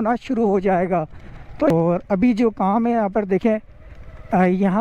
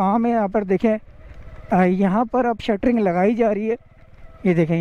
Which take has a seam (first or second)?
first